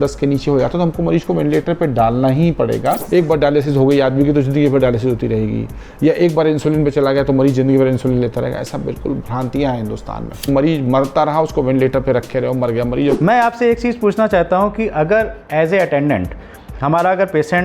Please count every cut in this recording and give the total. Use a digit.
3